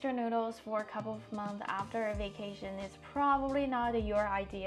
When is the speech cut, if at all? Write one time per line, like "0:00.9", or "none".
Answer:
none